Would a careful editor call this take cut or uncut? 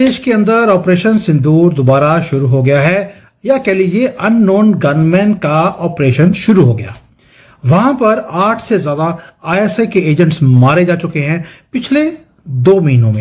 uncut